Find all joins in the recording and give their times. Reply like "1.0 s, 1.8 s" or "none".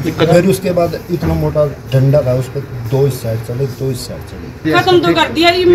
4.6 s